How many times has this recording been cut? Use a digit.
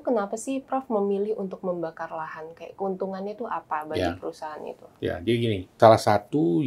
1